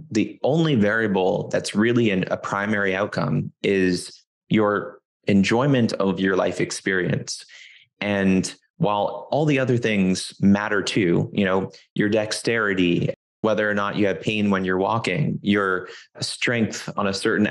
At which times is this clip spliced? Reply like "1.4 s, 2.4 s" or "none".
13.2 s, 16.1 s